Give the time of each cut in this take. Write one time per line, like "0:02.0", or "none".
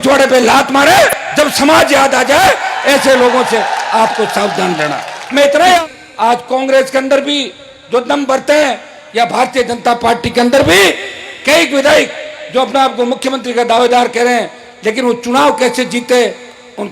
0:01.2
0:05.8